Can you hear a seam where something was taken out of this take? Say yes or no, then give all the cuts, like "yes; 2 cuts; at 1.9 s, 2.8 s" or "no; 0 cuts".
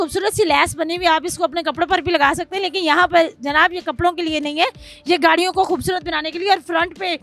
no; 0 cuts